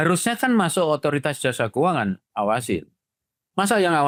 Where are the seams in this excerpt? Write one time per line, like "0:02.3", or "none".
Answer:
none

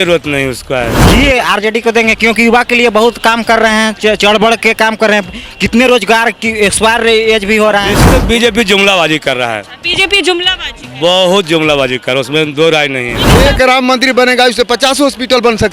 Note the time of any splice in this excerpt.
0:01.0
0:08.2
0:13.2

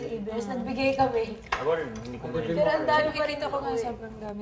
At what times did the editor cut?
0:01.8

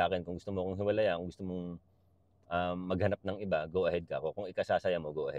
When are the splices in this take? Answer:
none

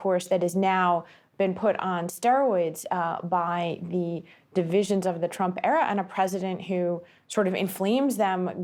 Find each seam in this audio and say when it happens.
none

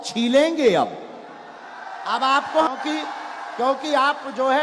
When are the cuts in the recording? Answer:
0:02.7

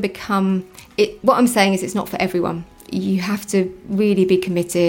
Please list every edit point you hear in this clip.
0:02.7

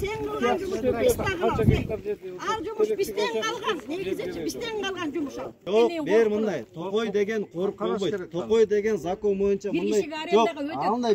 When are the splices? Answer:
0:05.6

